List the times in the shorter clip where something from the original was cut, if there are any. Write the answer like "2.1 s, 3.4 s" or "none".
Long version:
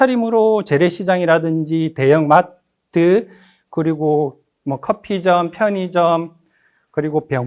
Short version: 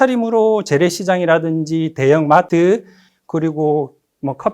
2.5 s